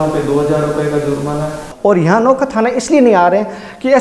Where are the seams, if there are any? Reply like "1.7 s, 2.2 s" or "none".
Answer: 1.7 s